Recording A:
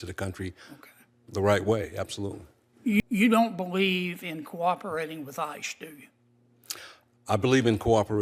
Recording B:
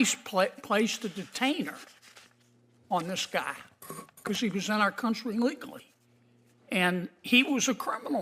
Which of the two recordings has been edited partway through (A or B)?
A